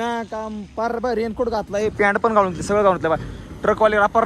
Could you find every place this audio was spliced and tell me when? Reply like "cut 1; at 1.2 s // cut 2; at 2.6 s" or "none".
none